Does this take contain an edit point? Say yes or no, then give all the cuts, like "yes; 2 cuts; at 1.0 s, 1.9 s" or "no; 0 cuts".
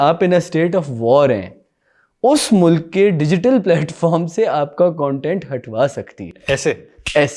no; 0 cuts